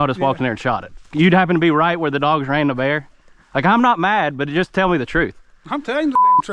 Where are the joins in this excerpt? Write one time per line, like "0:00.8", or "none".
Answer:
0:01.0